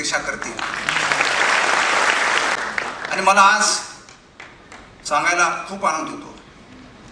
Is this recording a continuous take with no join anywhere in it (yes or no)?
no